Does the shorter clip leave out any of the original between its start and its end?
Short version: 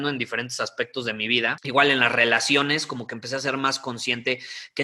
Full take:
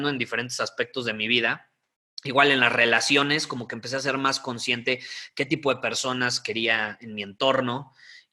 yes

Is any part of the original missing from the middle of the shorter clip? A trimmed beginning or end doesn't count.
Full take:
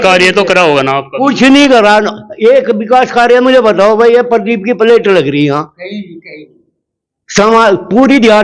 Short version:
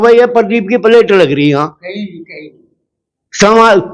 no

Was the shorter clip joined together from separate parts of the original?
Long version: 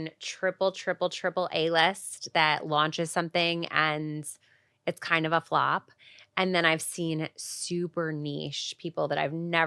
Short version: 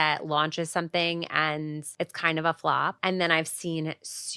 yes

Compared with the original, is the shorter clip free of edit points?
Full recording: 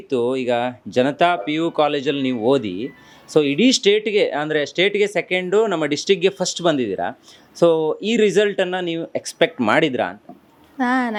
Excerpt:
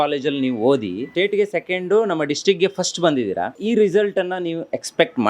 no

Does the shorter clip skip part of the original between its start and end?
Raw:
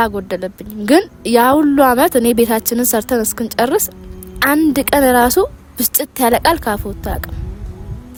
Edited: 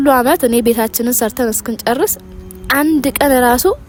no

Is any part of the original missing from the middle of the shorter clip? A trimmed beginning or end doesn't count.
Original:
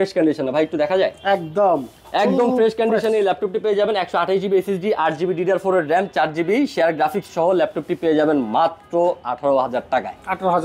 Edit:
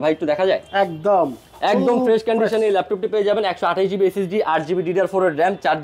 no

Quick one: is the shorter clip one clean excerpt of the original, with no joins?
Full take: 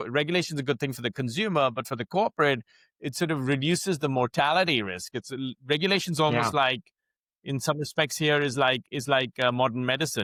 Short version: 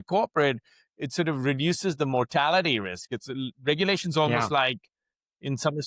yes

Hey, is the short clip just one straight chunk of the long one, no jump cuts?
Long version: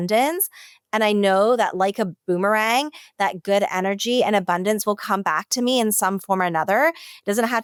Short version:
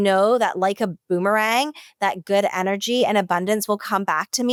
yes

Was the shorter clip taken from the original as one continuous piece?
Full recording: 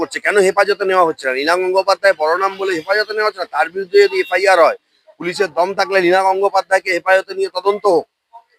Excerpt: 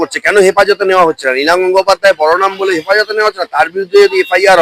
yes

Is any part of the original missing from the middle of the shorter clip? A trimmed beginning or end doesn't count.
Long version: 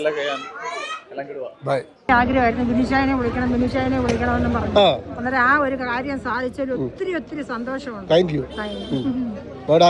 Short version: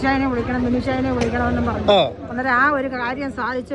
no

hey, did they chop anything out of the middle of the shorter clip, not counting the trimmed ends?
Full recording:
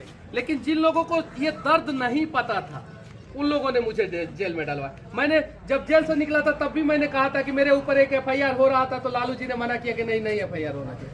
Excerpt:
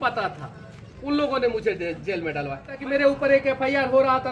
yes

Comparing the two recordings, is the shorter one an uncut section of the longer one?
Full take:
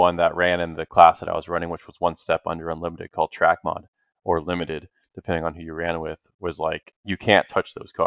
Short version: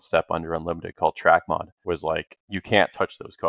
no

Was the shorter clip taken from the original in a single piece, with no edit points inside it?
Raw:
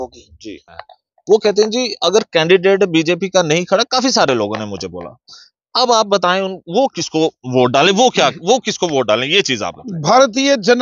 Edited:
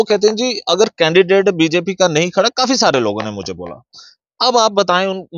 yes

